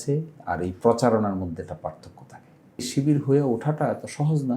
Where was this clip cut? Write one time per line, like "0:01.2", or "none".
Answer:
0:02.9